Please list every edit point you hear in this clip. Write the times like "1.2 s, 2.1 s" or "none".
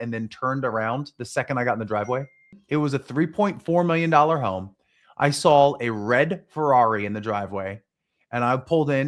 2.6 s